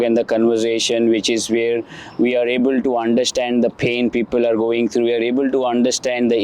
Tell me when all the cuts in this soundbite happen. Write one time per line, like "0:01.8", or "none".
none